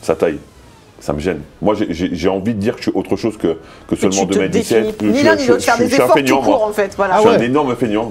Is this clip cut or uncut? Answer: cut